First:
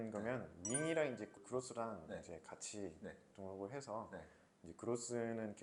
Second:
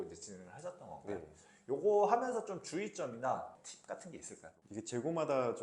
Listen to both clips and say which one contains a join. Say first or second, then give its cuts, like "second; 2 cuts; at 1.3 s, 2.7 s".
second; 1 cut; at 3.5 s